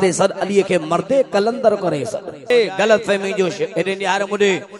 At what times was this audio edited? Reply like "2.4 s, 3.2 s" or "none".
2.5 s